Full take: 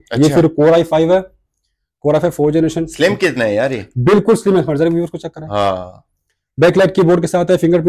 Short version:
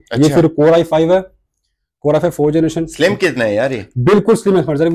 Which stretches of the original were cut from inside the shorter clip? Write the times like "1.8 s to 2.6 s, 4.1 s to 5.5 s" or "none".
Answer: none